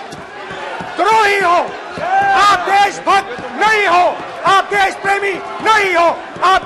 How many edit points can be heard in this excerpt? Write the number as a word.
zero